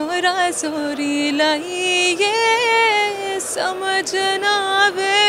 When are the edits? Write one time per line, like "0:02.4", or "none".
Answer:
none